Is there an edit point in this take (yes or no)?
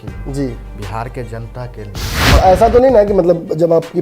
yes